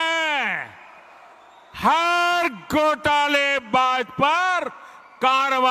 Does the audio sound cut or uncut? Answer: uncut